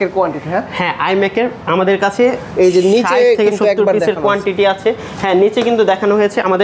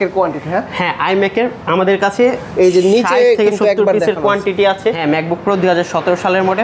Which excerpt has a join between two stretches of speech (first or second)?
second